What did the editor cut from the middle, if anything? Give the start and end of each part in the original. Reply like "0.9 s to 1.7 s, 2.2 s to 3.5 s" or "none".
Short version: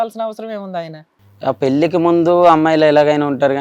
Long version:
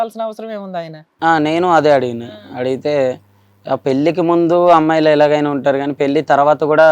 1.1 s to 3.3 s